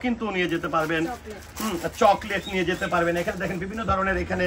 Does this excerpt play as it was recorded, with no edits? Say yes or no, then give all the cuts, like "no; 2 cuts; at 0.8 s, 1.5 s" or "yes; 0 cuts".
yes; 0 cuts